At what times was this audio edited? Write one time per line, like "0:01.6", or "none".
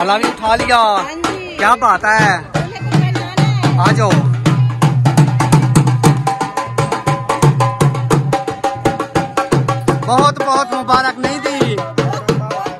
none